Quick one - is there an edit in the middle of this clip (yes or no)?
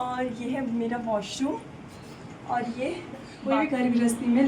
yes